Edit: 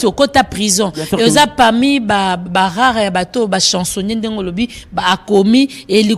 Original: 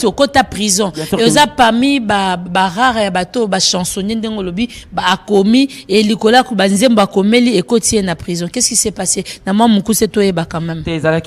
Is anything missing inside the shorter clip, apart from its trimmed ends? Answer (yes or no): no